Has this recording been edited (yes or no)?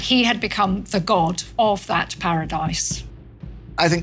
yes